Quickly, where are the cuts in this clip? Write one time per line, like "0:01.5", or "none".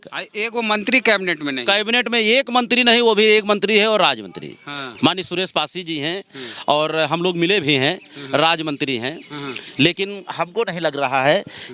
none